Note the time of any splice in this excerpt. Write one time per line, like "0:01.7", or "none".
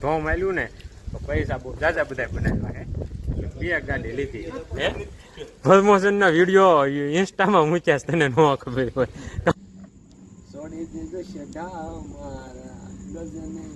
0:09.5